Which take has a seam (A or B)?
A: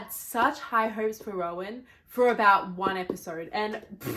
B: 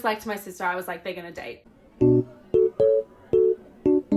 B